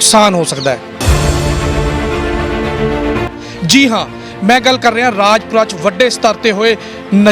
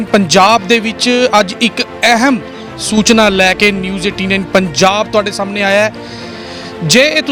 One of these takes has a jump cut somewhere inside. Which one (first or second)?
first